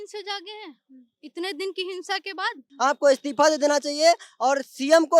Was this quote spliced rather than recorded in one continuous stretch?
yes; 1 cut; at 2.7 s

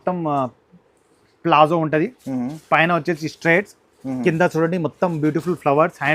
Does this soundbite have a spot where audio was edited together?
no; 0 cuts

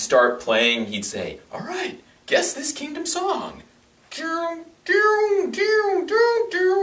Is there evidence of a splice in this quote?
no; 0 cuts

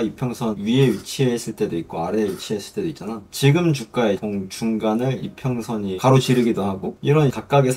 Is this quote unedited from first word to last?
yes; 0 cuts

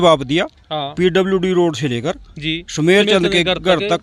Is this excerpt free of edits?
yes; 0 cuts

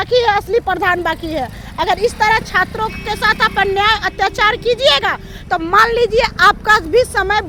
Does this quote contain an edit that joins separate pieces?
no; 0 cuts

